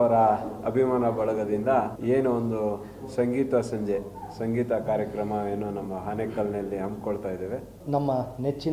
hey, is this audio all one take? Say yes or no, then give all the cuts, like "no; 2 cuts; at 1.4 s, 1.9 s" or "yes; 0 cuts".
no; 2 cuts; at 2.0 s, 7.8 s